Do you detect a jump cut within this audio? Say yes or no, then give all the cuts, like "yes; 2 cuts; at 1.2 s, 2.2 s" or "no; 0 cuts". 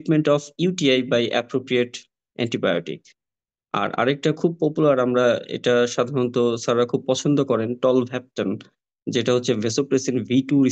no; 0 cuts